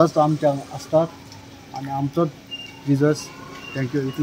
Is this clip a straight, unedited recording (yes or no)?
yes